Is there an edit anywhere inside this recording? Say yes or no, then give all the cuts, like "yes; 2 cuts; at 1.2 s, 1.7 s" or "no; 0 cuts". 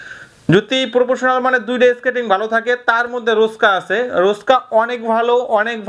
no; 0 cuts